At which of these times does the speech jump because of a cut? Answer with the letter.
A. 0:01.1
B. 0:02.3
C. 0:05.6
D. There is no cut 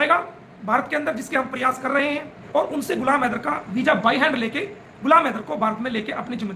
B